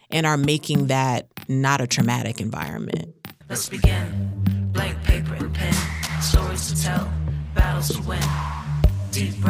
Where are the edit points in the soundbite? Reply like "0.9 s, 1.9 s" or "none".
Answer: 3.3 s

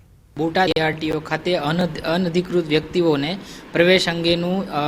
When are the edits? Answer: 1.4 s

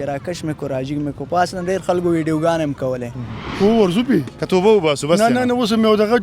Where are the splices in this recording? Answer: 3.5 s

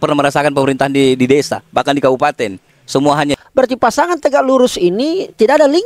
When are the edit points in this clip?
3.3 s

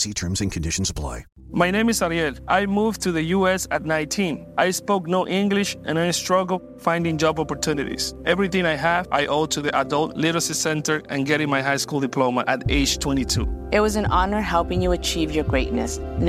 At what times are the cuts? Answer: 1.3 s

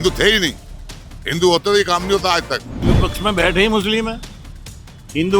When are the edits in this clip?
2.8 s

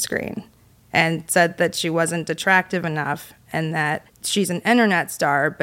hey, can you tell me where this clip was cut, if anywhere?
4.1 s

